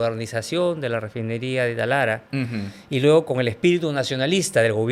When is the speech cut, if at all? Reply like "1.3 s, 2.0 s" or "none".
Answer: none

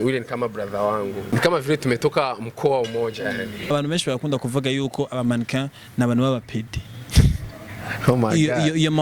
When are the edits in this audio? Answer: 1.2 s, 3.6 s

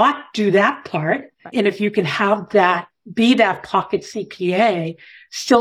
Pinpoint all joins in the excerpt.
1.5 s

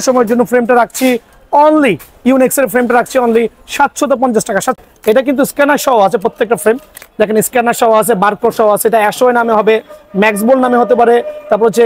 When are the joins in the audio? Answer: 4.8 s

